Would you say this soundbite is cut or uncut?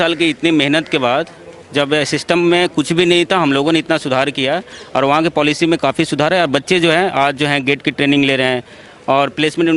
uncut